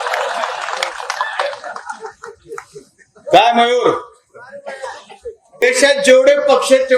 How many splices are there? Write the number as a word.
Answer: one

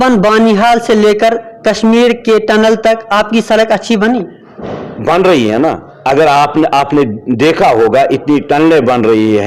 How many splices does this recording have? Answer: zero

